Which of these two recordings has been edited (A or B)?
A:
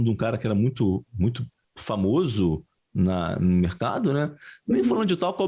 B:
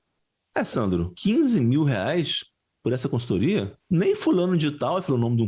B